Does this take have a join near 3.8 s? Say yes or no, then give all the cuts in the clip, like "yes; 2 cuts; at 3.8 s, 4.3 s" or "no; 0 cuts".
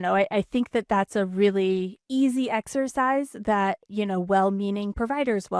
no; 1 cut; at 2.0 s